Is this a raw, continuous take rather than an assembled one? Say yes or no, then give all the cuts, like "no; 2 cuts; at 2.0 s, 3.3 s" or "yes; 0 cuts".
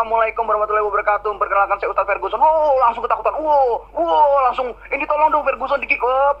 yes; 0 cuts